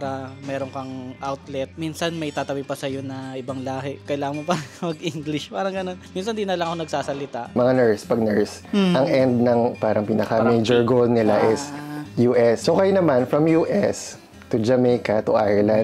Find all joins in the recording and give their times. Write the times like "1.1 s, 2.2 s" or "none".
1.7 s, 6.0 s, 7.5 s, 12.6 s

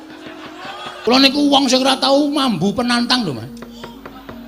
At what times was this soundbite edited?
0.9 s

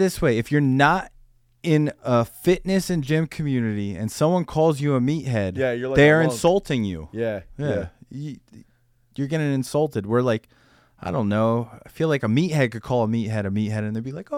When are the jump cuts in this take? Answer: none

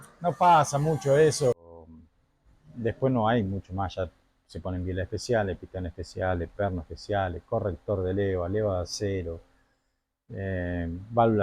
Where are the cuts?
1.9 s

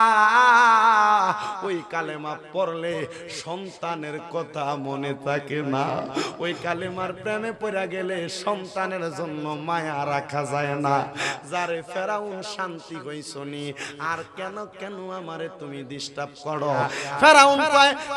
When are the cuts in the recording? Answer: 17.0 s

